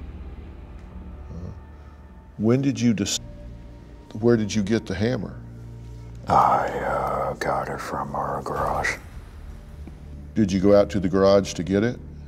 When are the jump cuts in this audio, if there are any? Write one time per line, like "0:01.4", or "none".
none